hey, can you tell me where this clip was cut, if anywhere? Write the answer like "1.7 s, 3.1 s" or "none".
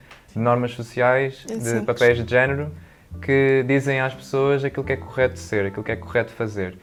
none